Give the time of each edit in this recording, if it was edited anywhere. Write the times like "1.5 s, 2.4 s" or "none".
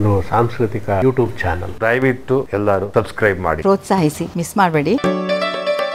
3.6 s, 5.0 s